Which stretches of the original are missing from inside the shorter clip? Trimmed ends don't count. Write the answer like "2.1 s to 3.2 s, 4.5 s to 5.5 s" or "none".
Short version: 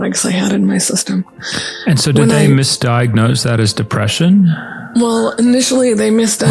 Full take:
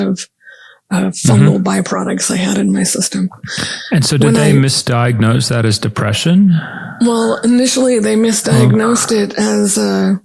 none